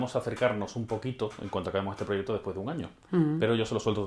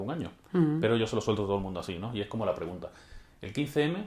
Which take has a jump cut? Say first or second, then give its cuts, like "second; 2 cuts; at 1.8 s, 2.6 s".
first; 1 cut; at 1.4 s